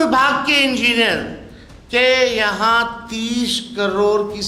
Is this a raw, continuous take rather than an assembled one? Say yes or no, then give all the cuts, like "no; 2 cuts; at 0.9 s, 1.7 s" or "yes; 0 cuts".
yes; 0 cuts